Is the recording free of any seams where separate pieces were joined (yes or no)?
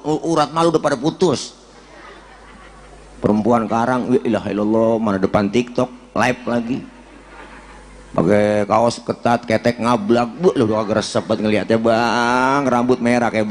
yes